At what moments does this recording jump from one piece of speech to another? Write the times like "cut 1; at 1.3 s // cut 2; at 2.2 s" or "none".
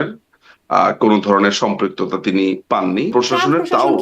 cut 1; at 3.1 s